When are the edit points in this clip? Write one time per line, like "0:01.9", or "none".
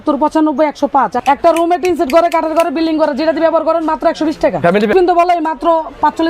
0:01.2
0:04.9